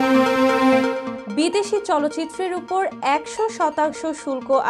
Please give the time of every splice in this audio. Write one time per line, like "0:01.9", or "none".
0:01.1